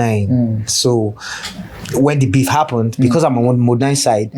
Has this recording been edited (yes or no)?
no